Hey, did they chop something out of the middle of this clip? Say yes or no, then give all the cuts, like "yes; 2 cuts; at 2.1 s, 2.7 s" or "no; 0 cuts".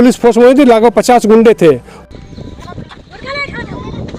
no; 0 cuts